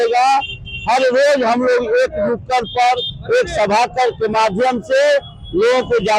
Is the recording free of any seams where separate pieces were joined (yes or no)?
yes